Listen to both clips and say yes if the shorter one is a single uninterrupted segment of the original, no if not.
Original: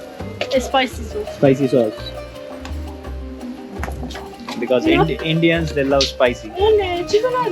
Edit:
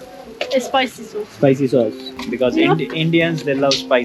no